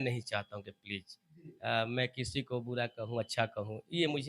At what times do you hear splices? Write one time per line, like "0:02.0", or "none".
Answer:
none